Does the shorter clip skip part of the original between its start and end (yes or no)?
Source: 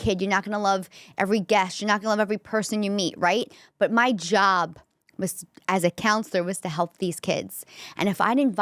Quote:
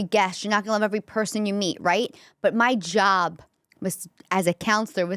no